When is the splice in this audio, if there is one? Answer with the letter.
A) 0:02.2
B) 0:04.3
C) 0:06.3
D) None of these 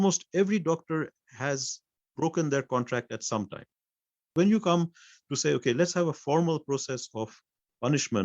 B